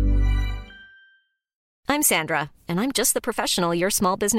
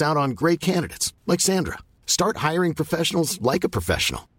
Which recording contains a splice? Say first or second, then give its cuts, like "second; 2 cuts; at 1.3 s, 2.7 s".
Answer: first; 1 cut; at 1.7 s